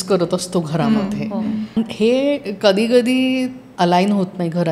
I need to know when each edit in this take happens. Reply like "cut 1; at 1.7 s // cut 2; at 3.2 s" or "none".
cut 1; at 1.8 s // cut 2; at 3.6 s